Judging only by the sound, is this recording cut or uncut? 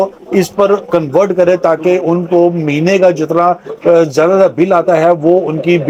uncut